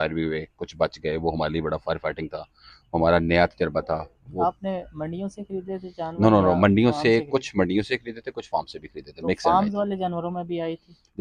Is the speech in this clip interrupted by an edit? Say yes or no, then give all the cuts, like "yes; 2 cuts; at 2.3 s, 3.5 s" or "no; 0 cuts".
no; 0 cuts